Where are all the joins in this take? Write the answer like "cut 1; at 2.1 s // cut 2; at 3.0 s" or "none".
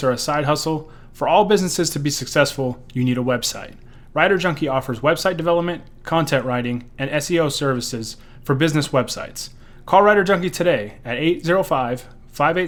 none